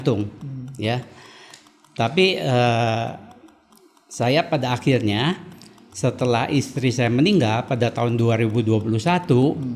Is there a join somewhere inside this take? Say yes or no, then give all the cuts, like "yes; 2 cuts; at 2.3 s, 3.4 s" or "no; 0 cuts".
no; 0 cuts